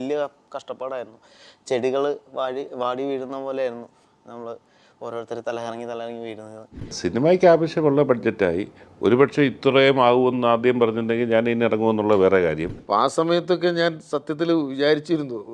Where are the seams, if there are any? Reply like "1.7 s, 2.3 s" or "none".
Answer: 7.0 s, 12.7 s